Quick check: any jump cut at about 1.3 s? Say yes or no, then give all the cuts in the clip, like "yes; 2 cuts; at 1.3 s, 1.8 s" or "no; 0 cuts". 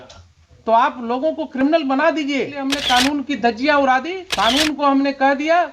no; 2 cuts; at 2.7 s, 4.2 s